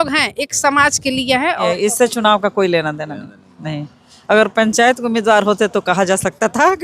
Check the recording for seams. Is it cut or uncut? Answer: cut